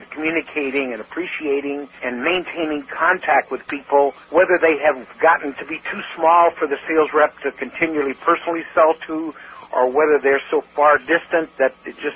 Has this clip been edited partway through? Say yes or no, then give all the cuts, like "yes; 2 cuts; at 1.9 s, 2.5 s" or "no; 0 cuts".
yes; 3 cuts; at 2.0 s, 4.2 s, 5.1 s